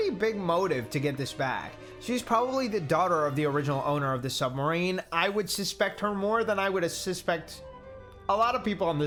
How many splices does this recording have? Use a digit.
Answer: 0